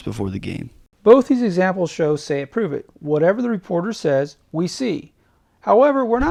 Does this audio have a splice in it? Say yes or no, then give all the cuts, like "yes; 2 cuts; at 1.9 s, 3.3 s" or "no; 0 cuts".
no; 0 cuts